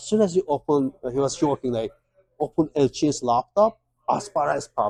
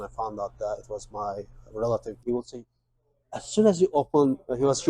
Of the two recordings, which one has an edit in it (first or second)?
second